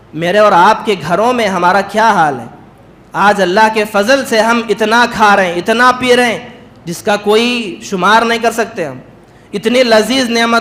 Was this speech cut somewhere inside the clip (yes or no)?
no